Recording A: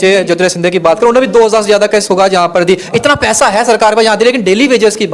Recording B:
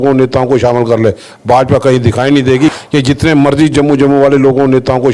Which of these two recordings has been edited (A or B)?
B